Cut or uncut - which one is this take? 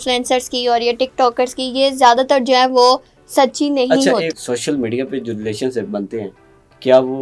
cut